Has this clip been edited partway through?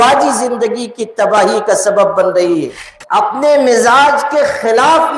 yes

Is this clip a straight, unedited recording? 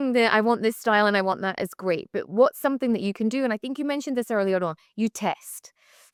yes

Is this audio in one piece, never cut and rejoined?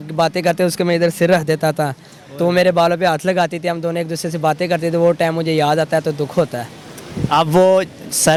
yes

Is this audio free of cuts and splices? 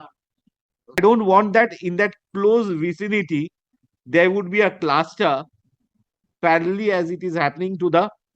no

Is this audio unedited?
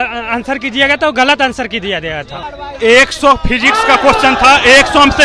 no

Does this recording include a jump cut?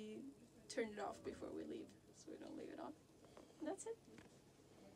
no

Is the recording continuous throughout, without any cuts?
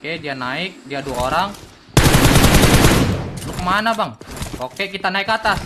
yes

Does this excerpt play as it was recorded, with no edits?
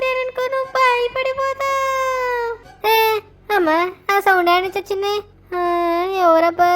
yes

